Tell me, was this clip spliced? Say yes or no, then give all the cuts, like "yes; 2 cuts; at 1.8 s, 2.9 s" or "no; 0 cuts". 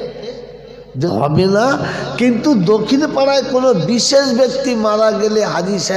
yes; 1 cut; at 1.1 s